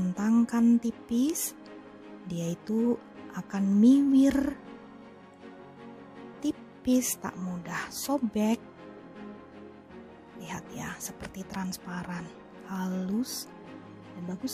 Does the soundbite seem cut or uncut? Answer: cut